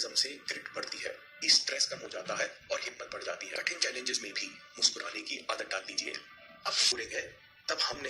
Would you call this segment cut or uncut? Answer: cut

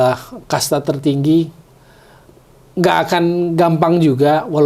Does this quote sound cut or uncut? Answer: uncut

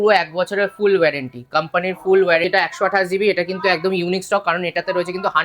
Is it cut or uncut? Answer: cut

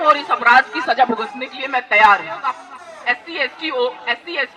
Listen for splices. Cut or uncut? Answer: cut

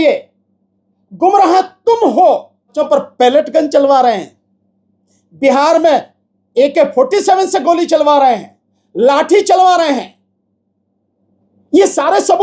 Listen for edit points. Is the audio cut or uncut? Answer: cut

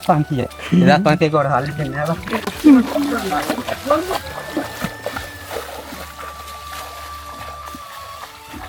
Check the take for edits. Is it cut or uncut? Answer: uncut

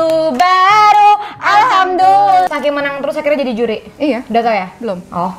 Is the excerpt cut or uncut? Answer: cut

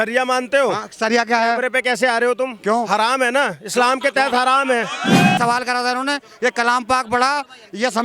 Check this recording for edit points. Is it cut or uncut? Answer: cut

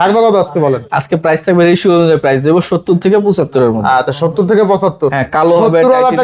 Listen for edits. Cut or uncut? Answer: uncut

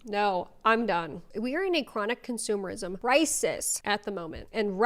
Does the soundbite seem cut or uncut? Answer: cut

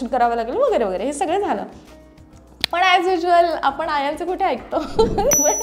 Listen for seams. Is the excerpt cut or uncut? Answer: uncut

